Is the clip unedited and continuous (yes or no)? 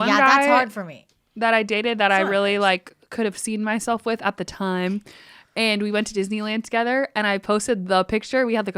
yes